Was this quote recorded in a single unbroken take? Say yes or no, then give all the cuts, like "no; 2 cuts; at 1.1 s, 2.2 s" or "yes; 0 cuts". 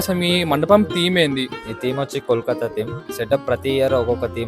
no; 2 cuts; at 1.6 s, 3.0 s